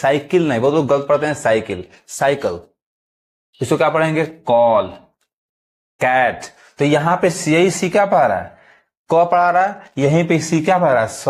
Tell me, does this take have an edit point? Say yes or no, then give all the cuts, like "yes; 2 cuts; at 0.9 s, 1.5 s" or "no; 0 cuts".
no; 0 cuts